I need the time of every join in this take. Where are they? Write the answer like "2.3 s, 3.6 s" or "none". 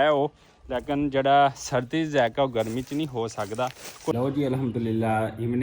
4.1 s